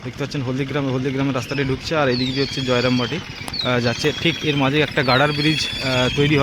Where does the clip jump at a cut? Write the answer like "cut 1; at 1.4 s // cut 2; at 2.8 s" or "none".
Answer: none